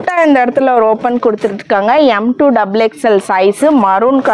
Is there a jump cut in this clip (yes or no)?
no